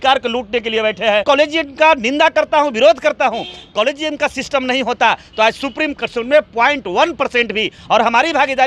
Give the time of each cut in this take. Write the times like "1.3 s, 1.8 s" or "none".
1.2 s, 7.8 s

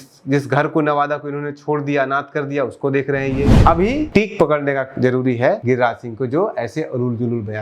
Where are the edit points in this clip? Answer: 3.6 s, 5.6 s

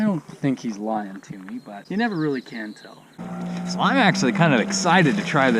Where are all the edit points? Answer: 1.7 s, 3.2 s

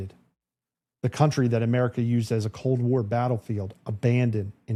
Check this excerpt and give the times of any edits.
none

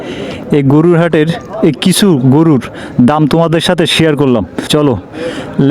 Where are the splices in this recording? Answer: 4.6 s

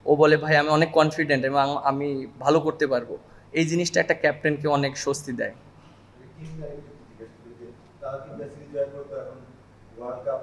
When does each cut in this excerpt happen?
none

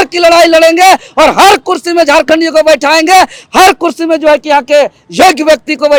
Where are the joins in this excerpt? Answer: none

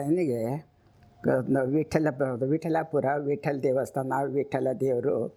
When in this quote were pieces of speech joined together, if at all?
none

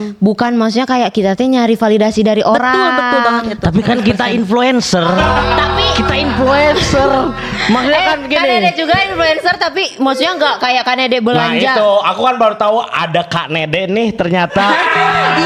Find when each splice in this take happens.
none

